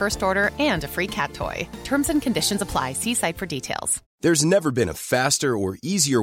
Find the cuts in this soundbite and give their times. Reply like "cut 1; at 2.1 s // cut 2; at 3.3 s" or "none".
cut 1; at 4.0 s

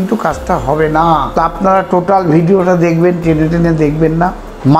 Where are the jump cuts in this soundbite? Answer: cut 1; at 1.3 s

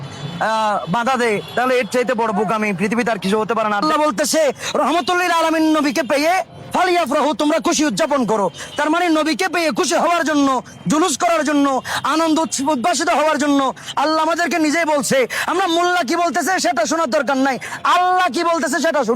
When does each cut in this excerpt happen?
cut 1; at 3.8 s

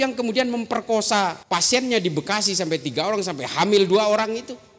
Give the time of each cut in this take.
cut 1; at 1.4 s

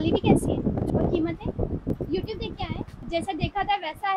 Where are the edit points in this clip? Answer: cut 1; at 0.9 s // cut 2; at 1.9 s // cut 3; at 3.1 s

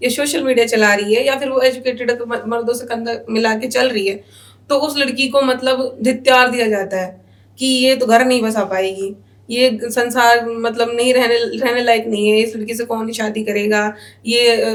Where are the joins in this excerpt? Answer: none

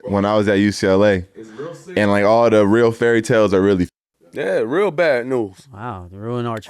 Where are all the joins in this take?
none

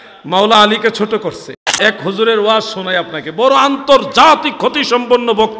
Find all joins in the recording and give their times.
cut 1; at 1.8 s

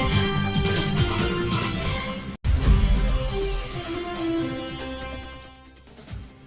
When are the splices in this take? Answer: cut 1; at 2.4 s // cut 2; at 3.7 s

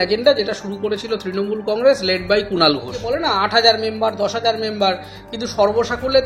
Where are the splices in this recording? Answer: cut 1; at 3.0 s

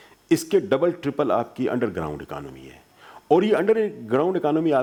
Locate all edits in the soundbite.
none

